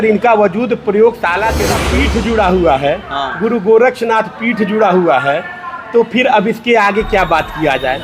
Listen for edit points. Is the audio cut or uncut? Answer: cut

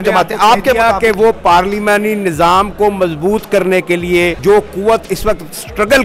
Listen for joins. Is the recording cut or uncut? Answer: cut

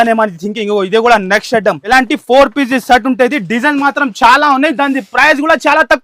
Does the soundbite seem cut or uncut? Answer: cut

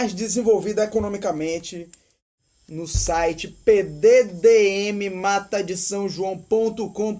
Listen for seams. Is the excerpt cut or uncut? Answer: cut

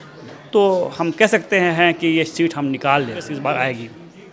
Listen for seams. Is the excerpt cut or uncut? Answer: cut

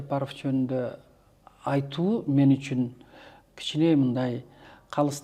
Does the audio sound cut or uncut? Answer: uncut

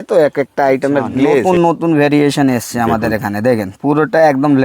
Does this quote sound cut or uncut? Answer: cut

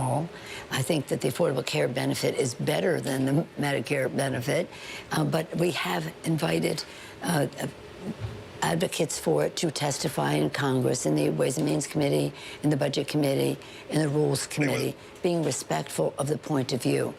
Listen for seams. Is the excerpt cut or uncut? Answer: uncut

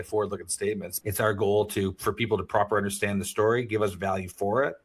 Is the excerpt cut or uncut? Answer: cut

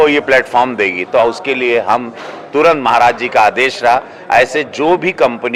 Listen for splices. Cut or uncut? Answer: uncut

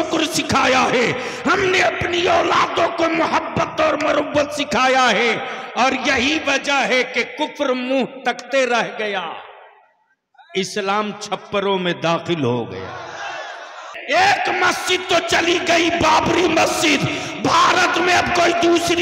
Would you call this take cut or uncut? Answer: cut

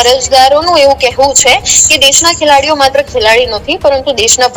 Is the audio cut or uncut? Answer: uncut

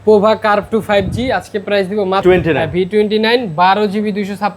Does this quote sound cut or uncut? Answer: cut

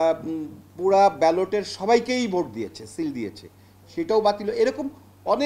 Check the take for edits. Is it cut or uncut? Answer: uncut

